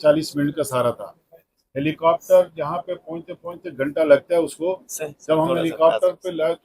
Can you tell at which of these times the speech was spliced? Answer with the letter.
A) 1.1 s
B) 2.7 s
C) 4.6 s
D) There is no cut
D